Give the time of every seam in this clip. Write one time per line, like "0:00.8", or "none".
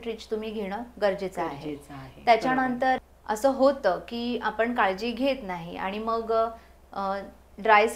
0:03.0